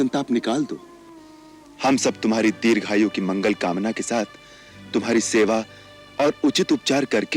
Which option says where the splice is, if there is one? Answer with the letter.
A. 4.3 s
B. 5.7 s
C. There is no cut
C